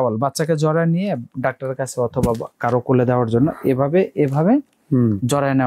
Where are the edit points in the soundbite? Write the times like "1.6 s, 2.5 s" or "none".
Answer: none